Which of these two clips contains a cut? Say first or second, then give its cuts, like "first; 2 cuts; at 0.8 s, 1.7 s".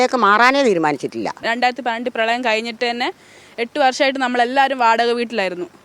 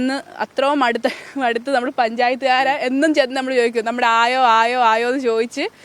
first; 1 cut; at 1.4 s